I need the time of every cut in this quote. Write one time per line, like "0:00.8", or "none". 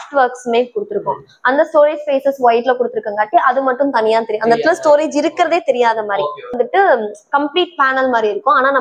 0:06.6